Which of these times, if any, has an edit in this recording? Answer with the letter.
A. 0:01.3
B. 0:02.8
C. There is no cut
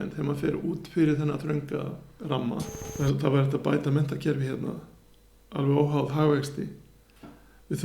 B